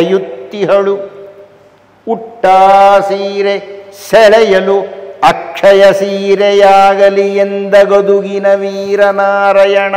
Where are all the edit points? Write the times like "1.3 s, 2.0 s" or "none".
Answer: none

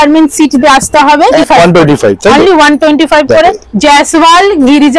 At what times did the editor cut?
1.4 s, 3.7 s

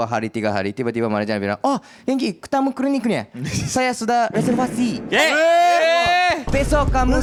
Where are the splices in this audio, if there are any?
none

